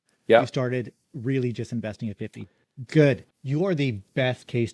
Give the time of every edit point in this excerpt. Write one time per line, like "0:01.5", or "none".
0:03.3